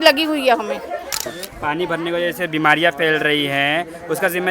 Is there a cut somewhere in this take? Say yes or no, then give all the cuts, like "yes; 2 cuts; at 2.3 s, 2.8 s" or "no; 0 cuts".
yes; 1 cut; at 1.2 s